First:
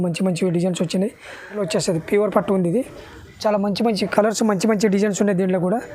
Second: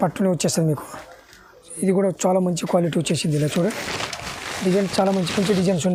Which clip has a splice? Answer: first; 1 cut; at 1.6 s

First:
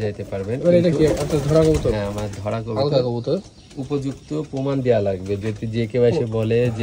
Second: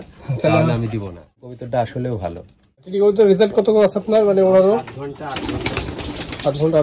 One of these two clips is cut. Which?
second; 2 cuts; at 1.3 s, 2.9 s

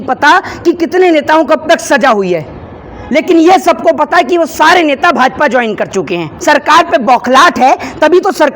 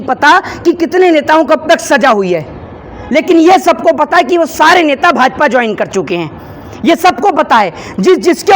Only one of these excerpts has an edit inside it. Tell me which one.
first; 1 cut; at 6.3 s

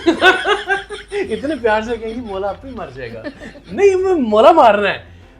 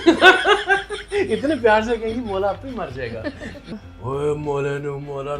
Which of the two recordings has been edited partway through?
second; 1 cut; at 3.7 s

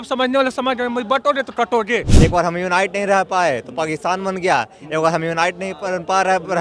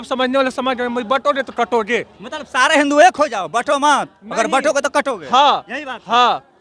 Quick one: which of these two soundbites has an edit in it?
first; 1 cut; at 2.1 s

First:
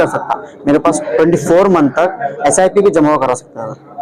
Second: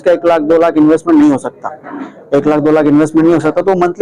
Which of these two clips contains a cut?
first; 1 cut; at 1.0 s

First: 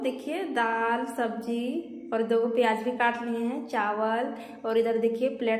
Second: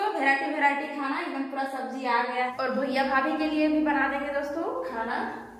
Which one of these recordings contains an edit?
second; 1 cut; at 2.3 s

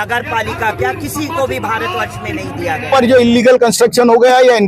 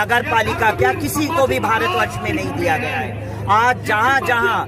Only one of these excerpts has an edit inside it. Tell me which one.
first; 1 cut; at 2.9 s

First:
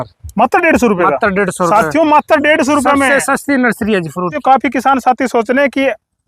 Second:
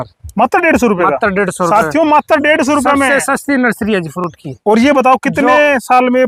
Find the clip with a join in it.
first; 1 cut; at 4.2 s

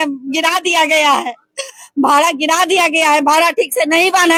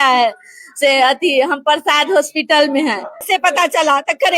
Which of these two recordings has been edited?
second; 1 cut; at 3.3 s

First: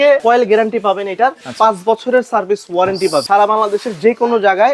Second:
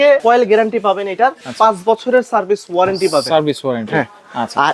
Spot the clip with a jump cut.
first; 1 cut; at 3.2 s

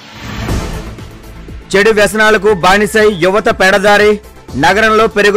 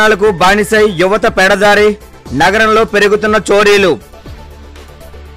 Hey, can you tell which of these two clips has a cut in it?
first; 1 cut; at 0.9 s

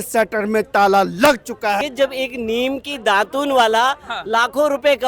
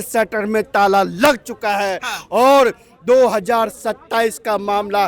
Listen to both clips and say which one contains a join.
first; 1 cut; at 1.8 s

